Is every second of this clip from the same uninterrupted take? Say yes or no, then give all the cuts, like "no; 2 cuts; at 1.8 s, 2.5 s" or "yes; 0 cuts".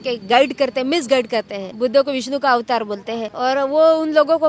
no; 2 cuts; at 1.6 s, 3.3 s